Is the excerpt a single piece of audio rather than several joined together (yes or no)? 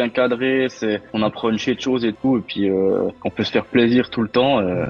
no